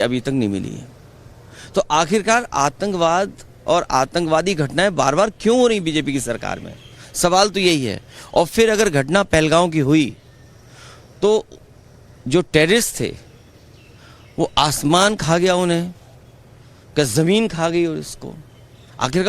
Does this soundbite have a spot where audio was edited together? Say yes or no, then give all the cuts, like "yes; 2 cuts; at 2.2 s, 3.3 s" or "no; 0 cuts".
yes; 1 cut; at 17.4 s